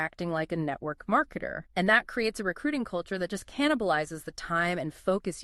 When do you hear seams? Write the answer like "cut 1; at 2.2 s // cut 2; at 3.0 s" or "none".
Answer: cut 1; at 1.6 s